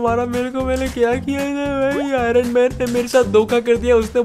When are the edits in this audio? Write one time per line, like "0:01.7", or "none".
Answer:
none